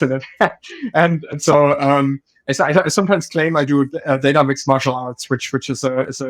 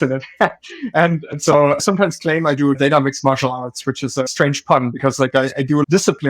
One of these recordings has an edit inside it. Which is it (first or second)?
second